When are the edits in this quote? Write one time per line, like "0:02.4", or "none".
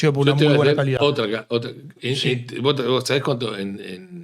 none